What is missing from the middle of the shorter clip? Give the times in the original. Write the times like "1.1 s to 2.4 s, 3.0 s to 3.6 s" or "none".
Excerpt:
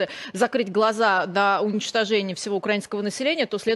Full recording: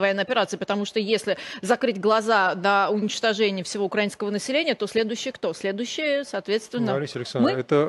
none